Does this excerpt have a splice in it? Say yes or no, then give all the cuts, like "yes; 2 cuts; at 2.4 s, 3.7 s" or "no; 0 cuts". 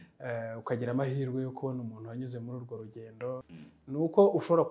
yes; 1 cut; at 3.5 s